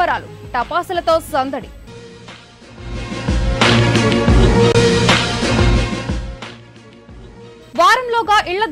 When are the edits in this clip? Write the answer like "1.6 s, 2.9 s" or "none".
none

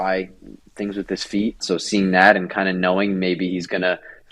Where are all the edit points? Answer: 1.6 s

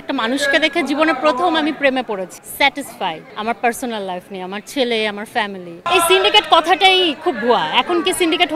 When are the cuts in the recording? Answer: 2.4 s, 5.8 s

